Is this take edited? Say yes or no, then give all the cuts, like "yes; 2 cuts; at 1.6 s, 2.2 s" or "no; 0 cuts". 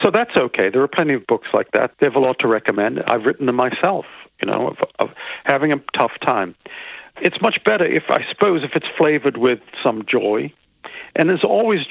yes; 2 cuts; at 1.9 s, 7.1 s